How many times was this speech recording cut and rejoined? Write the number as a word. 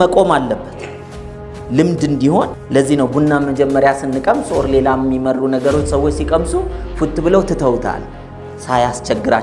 one